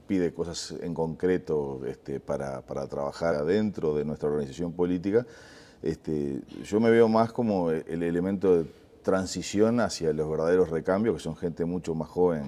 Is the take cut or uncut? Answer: uncut